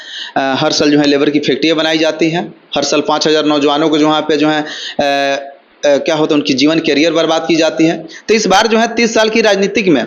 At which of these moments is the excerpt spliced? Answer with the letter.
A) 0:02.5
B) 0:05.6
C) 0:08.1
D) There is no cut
C